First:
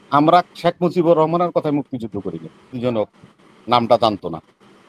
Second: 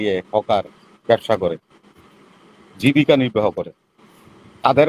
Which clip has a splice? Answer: first; 1 cut; at 2.7 s

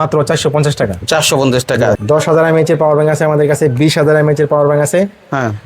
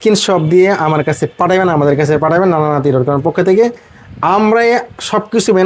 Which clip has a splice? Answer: first; 1 cut; at 2.0 s

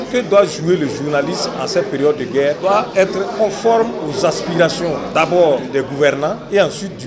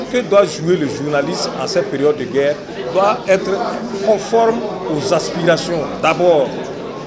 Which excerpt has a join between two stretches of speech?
first; 3 cuts; at 3.0 s, 4.0 s, 5.7 s

